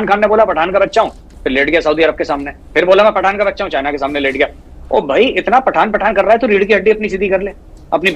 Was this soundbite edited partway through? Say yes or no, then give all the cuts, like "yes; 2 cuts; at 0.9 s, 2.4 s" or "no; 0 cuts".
yes; 1 cut; at 1.2 s